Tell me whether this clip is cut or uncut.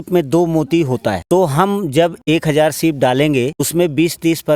cut